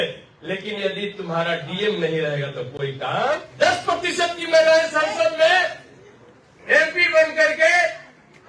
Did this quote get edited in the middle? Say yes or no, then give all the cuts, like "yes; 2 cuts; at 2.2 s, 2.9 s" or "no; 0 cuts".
yes; 1 cut; at 3.5 s